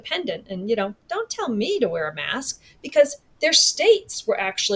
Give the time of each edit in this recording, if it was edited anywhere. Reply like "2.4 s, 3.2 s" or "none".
none